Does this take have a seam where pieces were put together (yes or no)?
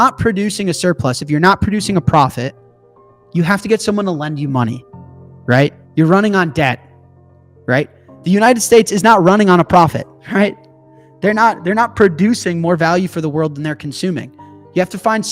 yes